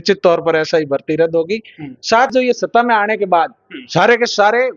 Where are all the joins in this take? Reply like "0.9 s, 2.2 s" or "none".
2.3 s